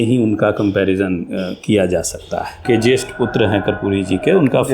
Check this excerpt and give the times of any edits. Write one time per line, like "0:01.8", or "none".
0:02.6